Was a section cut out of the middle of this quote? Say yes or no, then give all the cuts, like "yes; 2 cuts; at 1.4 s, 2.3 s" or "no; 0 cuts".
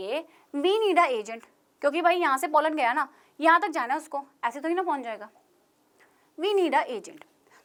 no; 0 cuts